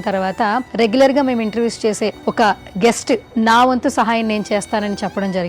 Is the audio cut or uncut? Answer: cut